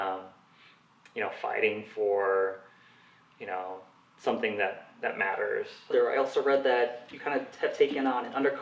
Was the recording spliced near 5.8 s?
yes; 1 cut; at 5.8 s

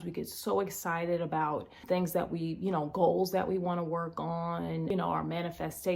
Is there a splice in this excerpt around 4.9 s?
yes; 2 cuts; at 1.8 s, 4.9 s

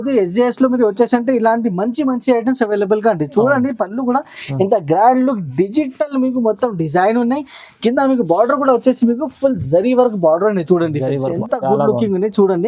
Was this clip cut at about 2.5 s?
no; 1 cut; at 11.4 s

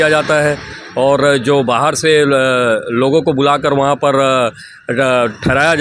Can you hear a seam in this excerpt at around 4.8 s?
no; 0 cuts

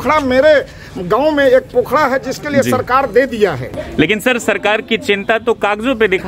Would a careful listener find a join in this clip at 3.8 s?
yes; 1 cut; at 3.8 s

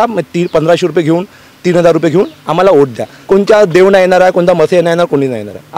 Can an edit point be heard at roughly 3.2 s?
yes; 1 cut; at 3.2 s

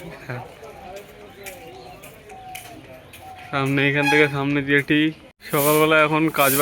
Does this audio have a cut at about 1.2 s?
no; 1 cut; at 5.3 s

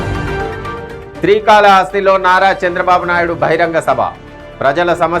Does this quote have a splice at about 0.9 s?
no; 0 cuts

